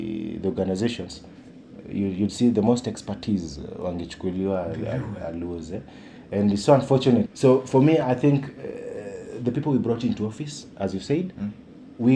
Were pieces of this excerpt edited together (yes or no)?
yes